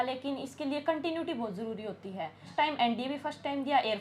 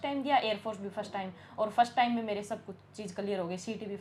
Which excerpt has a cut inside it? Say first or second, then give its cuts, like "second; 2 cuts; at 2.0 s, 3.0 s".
first; 1 cut; at 2.5 s